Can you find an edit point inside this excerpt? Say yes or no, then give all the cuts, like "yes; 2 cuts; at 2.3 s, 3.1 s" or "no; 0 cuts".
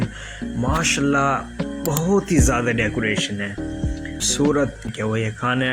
yes; 1 cut; at 4.2 s